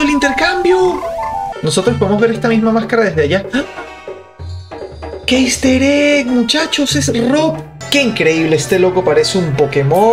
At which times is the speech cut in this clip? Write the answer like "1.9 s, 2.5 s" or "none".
1.4 s, 7.7 s